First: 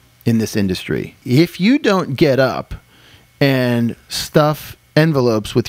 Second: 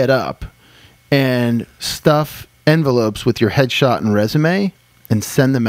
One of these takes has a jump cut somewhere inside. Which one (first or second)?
first